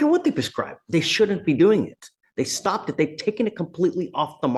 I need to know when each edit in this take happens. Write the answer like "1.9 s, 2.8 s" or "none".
none